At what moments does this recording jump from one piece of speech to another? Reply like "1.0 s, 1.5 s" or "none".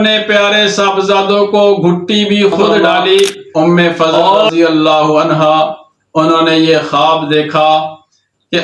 3.4 s

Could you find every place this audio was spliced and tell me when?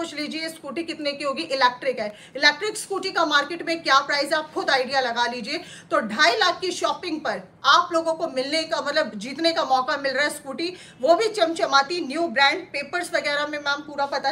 none

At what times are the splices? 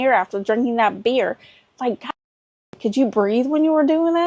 none

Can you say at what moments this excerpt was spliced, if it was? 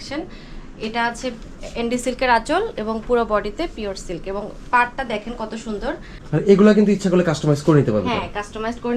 6.1 s

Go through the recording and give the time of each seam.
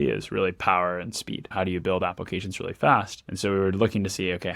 1.5 s, 3.2 s

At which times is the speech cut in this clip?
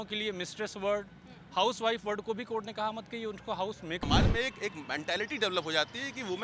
4.0 s

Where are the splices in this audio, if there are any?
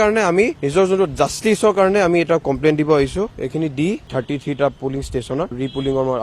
3.3 s

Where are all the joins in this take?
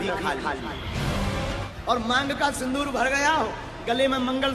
1.7 s

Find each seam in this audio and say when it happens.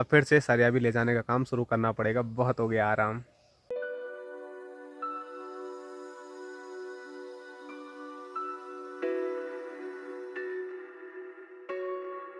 none

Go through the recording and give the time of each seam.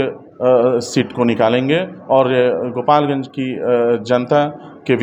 none

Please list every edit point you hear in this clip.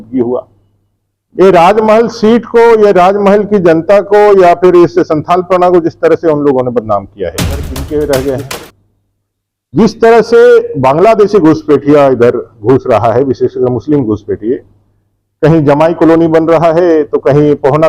7.7 s

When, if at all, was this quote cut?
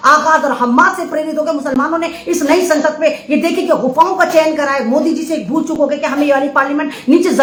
none

